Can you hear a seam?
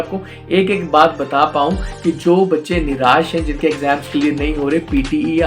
no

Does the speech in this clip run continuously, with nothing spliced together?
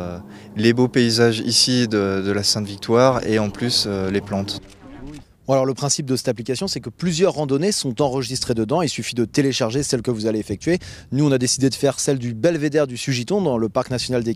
no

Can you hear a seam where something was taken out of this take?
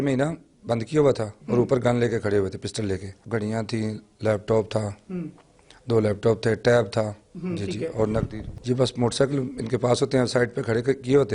yes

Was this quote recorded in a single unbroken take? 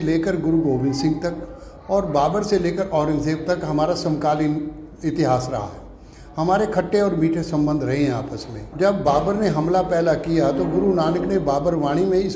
no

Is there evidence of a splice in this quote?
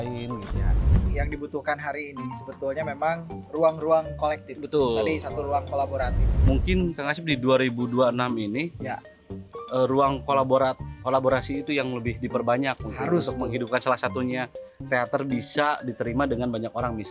yes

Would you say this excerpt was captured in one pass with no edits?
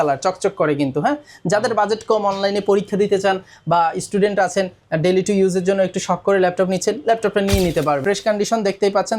no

